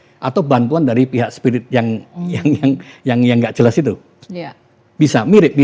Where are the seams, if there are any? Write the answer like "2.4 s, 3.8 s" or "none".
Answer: none